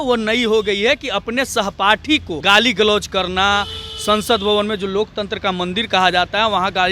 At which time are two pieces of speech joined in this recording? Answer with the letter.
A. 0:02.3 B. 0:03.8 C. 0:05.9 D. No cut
A